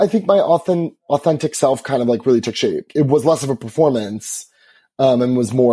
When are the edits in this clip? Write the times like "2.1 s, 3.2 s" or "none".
2.9 s